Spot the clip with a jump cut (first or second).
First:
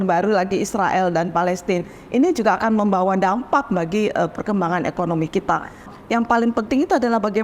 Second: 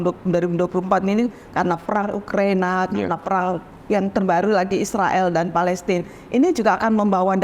first